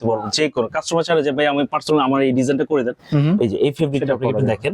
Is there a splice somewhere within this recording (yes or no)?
no